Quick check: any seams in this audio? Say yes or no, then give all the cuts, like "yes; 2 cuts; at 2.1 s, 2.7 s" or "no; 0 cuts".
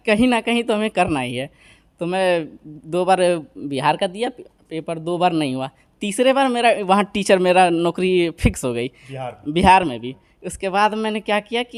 no; 0 cuts